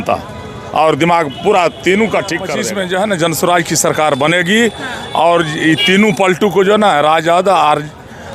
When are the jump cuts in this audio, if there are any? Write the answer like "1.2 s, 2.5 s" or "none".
2.6 s